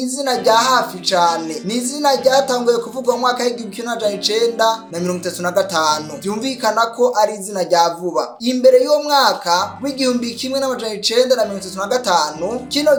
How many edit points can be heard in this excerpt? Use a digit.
0